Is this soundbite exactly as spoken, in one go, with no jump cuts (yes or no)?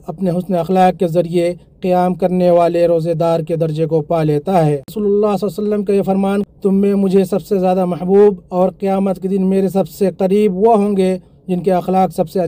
no